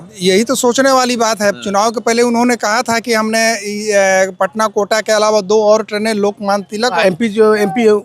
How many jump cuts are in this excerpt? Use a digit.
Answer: 1